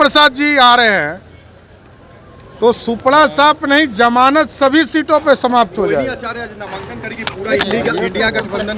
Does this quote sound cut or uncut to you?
uncut